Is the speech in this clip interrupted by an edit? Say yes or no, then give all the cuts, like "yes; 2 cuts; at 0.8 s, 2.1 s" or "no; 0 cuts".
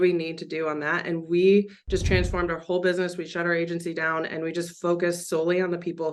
no; 0 cuts